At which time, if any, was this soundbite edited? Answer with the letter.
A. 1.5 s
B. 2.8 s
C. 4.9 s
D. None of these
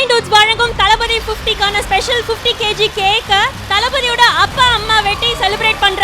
C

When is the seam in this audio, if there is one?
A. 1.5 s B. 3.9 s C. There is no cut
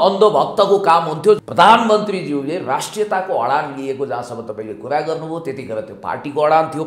A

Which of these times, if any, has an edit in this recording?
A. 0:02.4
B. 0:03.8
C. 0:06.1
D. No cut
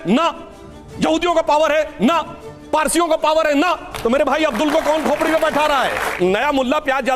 C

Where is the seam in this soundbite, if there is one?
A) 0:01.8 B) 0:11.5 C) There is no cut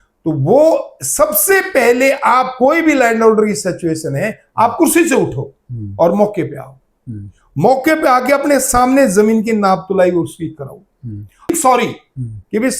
B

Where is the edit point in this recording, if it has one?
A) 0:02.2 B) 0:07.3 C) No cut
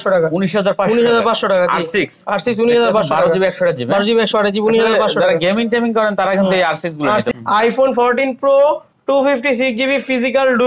B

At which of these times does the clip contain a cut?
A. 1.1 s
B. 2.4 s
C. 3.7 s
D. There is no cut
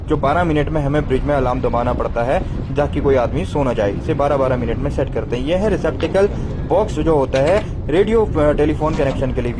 D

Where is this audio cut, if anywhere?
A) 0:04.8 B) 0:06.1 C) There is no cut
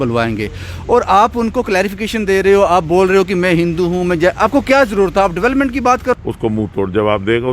B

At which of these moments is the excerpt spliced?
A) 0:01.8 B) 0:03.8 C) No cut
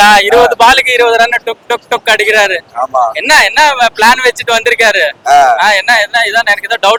C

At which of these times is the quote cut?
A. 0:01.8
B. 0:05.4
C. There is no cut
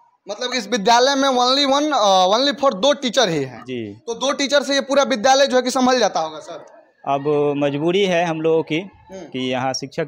C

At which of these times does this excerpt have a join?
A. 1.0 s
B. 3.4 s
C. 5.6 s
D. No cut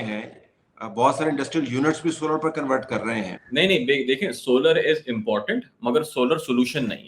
B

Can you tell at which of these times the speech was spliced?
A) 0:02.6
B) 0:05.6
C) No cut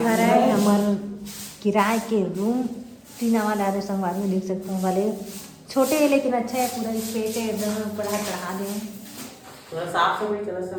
C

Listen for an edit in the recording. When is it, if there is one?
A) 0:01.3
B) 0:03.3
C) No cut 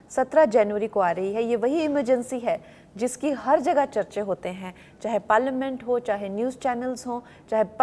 C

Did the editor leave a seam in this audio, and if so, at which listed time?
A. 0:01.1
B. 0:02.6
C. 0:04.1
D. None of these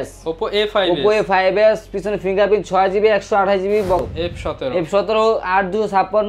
C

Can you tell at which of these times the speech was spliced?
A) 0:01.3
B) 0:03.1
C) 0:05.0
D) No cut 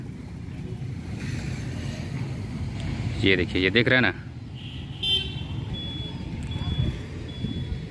D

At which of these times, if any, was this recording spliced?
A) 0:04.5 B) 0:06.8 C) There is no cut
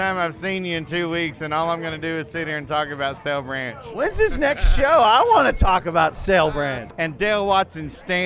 B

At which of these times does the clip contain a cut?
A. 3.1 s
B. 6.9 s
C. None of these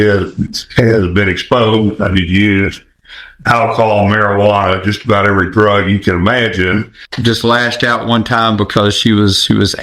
B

